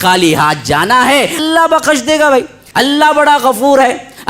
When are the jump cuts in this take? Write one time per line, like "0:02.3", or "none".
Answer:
0:01.4
0:02.6